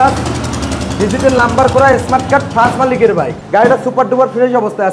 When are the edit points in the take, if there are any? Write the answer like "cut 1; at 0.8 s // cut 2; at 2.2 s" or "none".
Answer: cut 1; at 3.4 s